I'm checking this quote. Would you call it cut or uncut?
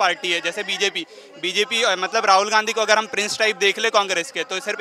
uncut